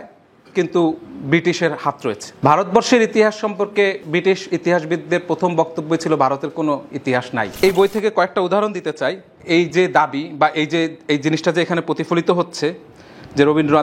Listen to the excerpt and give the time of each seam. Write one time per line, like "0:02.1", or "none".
0:02.3
0:07.6
0:09.3